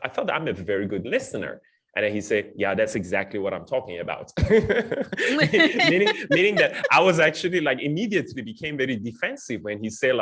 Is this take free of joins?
yes; 0 cuts

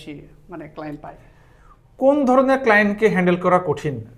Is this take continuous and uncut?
yes; 0 cuts

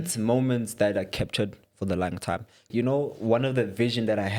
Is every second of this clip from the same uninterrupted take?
no; 1 cut; at 2.7 s

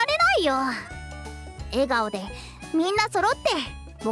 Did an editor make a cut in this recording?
no; 0 cuts

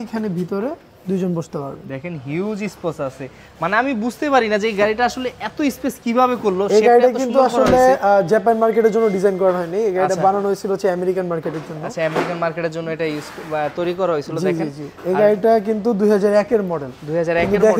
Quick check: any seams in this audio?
no; 0 cuts

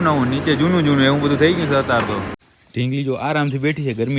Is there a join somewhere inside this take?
yes; 1 cut; at 2.4 s

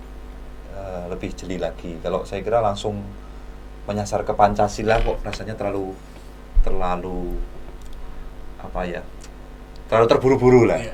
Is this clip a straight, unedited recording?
yes; 0 cuts

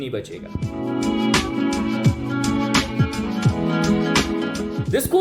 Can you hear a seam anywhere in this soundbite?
no; 0 cuts

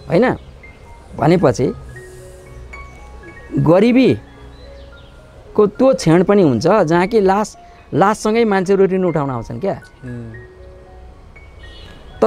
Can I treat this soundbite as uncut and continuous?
yes; 0 cuts

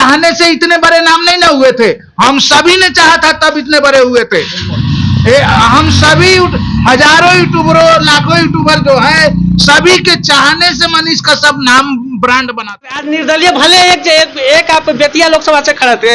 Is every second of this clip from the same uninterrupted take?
no; 1 cut; at 12.8 s

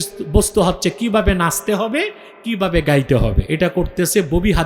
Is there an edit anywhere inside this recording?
yes; 1 cut; at 3.4 s

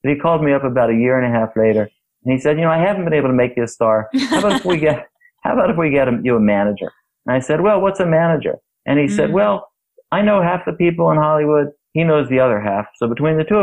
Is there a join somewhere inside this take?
no; 0 cuts

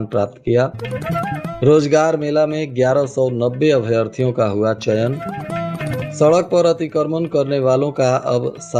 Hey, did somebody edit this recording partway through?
no; 0 cuts

